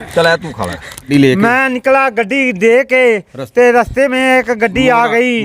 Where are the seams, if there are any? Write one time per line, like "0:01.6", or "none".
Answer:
0:01.1